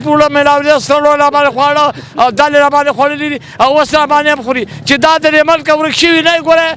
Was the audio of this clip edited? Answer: no; 0 cuts

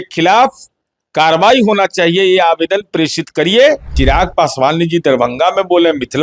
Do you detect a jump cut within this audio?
yes; 1 cut; at 3.9 s

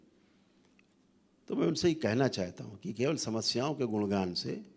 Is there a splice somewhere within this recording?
yes; 1 cut; at 1.0 s

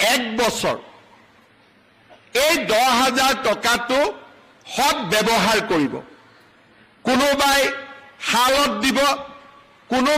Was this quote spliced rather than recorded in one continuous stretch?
no; 0 cuts

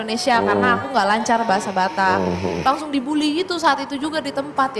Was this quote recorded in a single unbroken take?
yes; 0 cuts

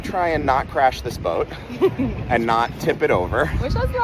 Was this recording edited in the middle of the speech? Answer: no; 0 cuts

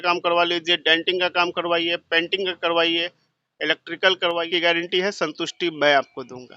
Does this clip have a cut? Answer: yes; 1 cut; at 4.5 s

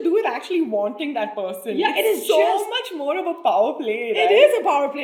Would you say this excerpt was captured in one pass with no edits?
yes; 0 cuts

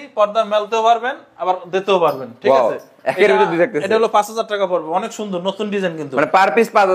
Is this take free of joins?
yes; 0 cuts

